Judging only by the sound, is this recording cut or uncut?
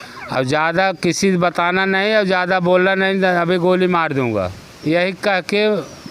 uncut